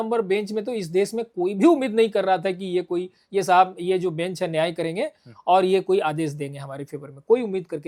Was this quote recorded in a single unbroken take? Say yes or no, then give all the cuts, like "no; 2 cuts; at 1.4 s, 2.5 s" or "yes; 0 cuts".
yes; 0 cuts